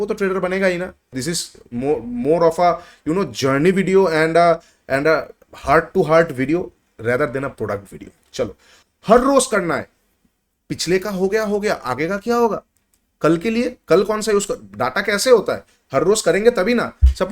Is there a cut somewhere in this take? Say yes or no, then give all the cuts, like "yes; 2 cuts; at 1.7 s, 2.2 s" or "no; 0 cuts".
yes; 2 cuts; at 1.0 s, 8.8 s